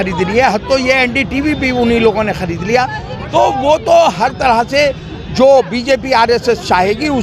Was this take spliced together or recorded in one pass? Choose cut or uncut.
uncut